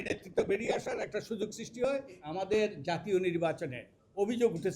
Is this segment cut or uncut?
cut